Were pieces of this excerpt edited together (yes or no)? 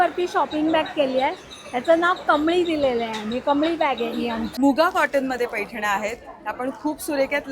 yes